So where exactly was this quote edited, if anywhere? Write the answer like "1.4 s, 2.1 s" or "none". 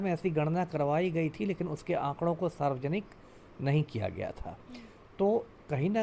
none